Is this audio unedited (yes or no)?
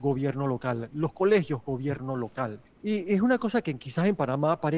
no